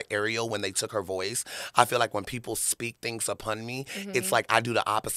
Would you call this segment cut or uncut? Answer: uncut